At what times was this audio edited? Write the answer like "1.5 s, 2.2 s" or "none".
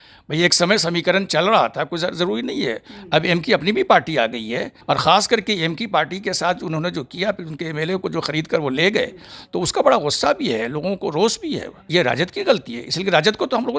4.7 s, 11.9 s